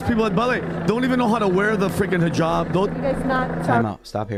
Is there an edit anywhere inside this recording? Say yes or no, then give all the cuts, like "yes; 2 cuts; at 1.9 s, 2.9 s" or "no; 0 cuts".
no; 0 cuts